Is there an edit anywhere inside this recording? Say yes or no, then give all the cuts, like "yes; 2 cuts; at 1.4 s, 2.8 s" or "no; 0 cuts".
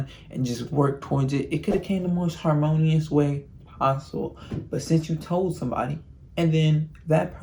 no; 0 cuts